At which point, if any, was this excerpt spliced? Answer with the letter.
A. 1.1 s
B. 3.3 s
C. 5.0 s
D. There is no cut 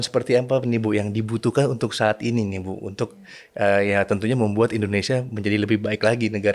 D